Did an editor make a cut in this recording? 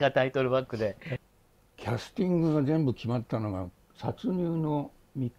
yes; 1 cut; at 1.1 s

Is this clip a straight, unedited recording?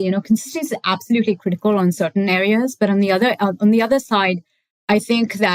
yes; 0 cuts

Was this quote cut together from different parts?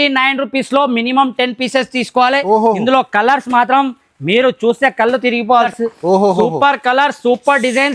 yes; 1 cut; at 5.7 s

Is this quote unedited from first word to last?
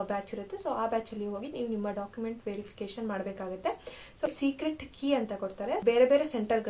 no; 2 cuts; at 4.3 s, 5.8 s

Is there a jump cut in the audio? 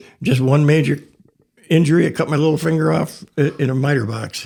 no; 0 cuts

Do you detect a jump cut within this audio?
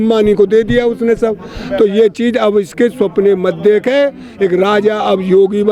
no; 0 cuts

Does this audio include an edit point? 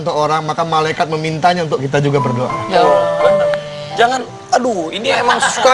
no; 0 cuts

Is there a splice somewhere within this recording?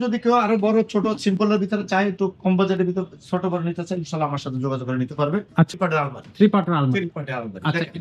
yes; 1 cut; at 5.8 s

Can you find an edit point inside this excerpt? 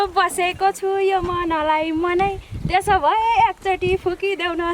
no; 0 cuts

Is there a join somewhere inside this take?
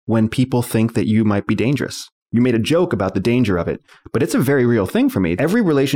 no; 0 cuts

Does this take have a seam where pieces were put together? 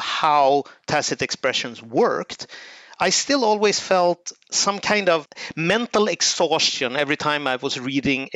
no; 0 cuts

